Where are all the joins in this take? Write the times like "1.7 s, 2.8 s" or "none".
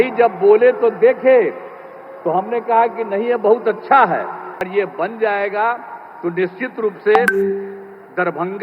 4.7 s